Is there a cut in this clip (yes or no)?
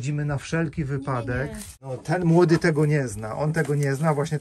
yes